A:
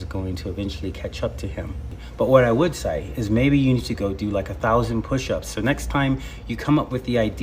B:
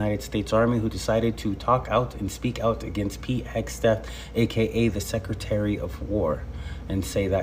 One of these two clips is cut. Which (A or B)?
A